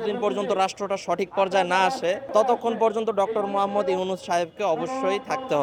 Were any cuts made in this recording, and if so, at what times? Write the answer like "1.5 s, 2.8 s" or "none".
none